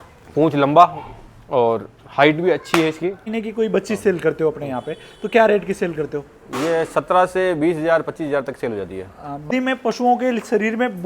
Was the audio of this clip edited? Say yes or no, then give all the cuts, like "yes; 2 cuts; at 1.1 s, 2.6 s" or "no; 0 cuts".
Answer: yes; 2 cuts; at 3.3 s, 9.5 s